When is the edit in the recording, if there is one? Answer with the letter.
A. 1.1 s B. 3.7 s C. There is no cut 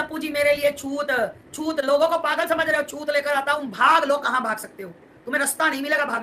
B